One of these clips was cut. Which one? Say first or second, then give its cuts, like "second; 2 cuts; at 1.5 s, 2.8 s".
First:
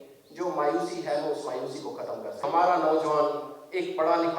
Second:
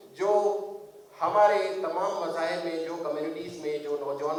first; 1 cut; at 2.4 s